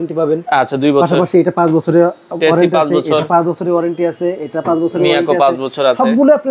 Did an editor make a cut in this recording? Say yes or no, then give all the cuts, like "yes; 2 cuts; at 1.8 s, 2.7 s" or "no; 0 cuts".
no; 0 cuts